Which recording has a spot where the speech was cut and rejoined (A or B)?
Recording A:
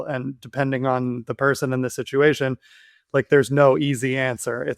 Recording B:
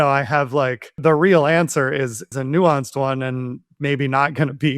B